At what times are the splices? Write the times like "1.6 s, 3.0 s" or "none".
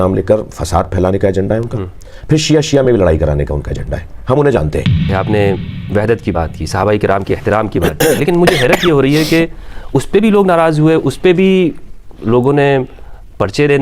5.1 s